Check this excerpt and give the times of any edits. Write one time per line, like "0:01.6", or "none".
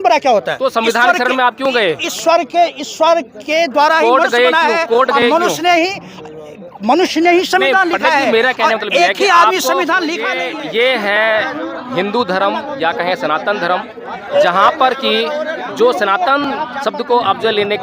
0:10.4